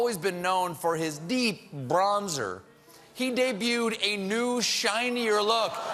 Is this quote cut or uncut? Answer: uncut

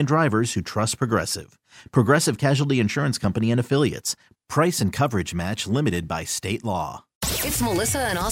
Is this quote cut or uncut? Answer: cut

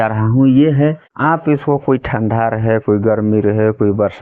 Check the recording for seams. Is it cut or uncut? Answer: cut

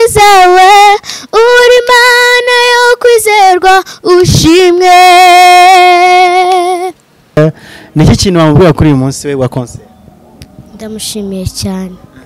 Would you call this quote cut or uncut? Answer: cut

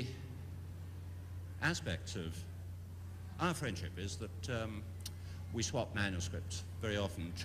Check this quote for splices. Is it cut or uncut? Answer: cut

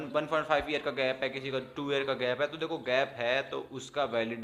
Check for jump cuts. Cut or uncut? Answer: uncut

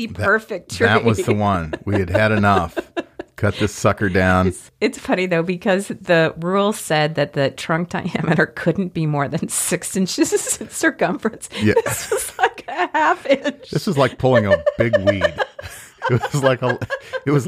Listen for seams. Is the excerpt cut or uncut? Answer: uncut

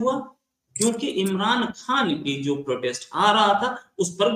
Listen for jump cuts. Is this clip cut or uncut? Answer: uncut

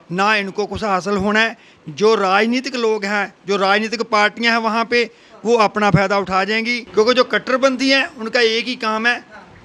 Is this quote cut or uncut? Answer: cut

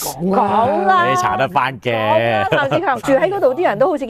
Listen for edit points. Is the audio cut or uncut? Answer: cut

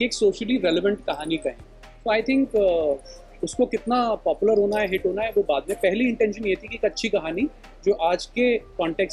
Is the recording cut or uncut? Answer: uncut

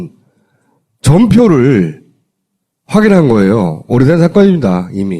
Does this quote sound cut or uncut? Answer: cut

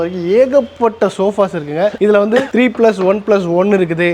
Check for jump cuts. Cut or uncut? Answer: uncut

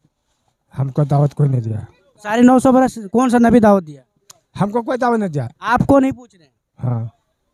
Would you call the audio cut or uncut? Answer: uncut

